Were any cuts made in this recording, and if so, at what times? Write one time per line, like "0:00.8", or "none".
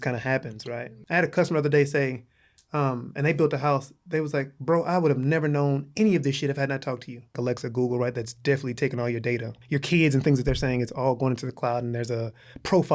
0:00.9
0:07.4
0:09.5